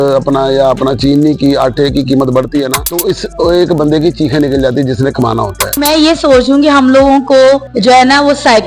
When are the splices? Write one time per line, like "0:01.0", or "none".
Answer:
0:02.8
0:05.7
0:07.7